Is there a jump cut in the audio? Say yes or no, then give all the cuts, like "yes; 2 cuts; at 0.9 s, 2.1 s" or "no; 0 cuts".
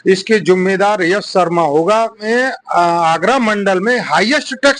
yes; 1 cut; at 2.2 s